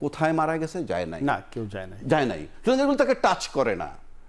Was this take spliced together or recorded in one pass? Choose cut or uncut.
uncut